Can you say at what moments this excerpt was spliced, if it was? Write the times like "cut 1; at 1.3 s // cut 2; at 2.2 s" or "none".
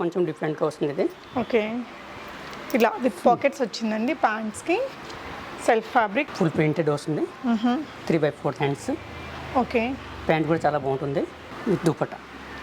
cut 1; at 6.3 s // cut 2; at 11.4 s